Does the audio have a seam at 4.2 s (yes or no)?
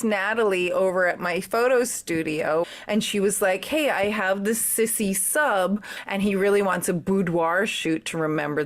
no